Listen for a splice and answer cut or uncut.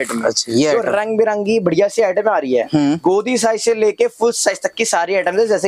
uncut